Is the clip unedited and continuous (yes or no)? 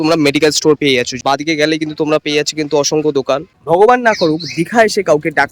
no